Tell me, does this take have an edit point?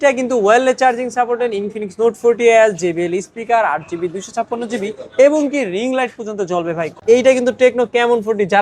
yes; 1 cut; at 6.9 s

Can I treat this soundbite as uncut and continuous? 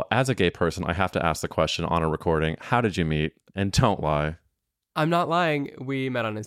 yes; 0 cuts

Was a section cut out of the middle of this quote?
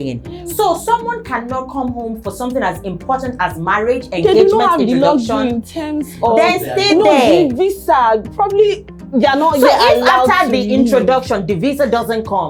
no; 0 cuts

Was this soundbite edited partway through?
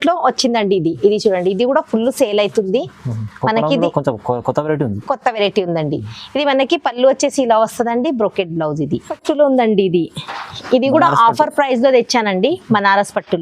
yes; 1 cut; at 9.1 s

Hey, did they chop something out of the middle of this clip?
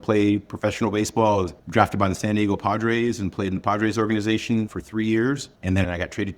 yes; 2 cuts; at 1.6 s, 5.5 s

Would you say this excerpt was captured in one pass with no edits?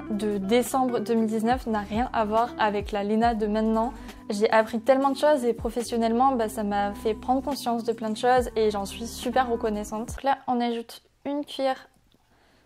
yes; 0 cuts

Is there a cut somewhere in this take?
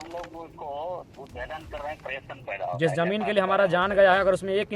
yes; 1 cut; at 2.3 s

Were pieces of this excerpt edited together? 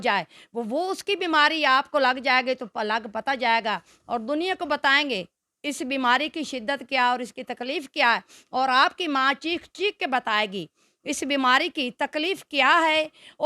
no; 0 cuts

